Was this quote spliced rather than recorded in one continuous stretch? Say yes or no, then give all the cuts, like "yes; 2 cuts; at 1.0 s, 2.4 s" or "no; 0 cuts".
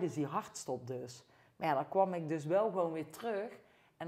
no; 0 cuts